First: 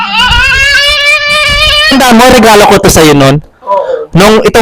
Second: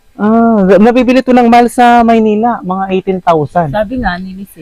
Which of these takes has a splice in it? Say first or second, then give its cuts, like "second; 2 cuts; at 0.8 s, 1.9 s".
first; 1 cut; at 1.9 s